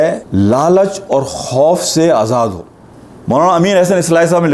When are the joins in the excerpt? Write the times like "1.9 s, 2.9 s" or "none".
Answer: 2.6 s